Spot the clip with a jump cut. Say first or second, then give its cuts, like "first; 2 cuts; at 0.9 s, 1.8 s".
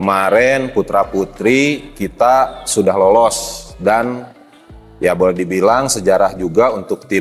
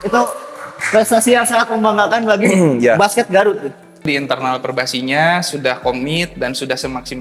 second; 1 cut; at 4.1 s